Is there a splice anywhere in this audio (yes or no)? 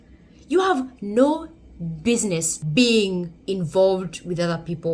yes